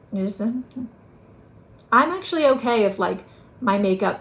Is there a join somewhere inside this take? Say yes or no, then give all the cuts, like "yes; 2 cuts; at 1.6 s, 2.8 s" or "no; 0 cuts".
no; 0 cuts